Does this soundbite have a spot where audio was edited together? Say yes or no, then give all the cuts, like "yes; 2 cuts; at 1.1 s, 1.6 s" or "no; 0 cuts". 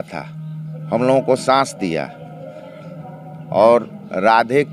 no; 0 cuts